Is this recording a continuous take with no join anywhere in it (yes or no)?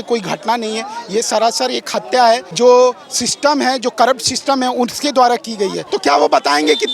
no